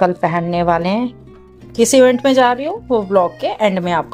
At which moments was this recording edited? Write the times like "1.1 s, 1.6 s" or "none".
none

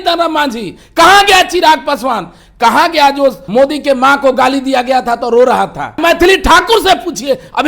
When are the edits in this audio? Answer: 3.4 s, 6.0 s

